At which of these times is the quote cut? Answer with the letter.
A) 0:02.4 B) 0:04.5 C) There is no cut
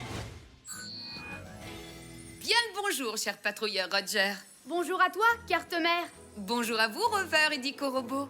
A